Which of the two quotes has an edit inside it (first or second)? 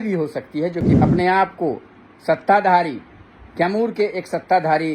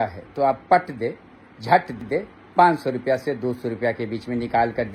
first